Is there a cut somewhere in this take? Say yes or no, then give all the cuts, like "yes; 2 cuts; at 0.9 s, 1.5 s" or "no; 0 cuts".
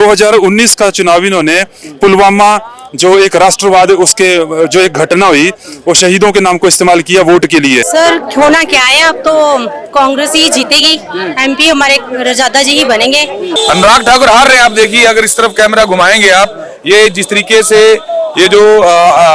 yes; 2 cuts; at 7.8 s, 13.5 s